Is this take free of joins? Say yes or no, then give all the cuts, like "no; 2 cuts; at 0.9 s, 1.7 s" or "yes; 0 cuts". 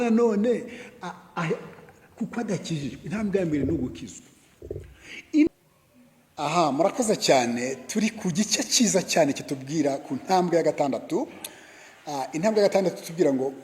no; 1 cut; at 5.5 s